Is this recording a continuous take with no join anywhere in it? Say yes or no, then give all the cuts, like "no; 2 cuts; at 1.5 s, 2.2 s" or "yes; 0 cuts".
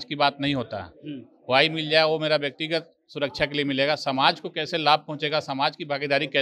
yes; 0 cuts